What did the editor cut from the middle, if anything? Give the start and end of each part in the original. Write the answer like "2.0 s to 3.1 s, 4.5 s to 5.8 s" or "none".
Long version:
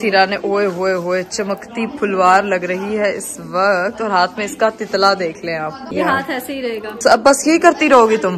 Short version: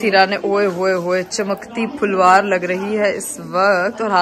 none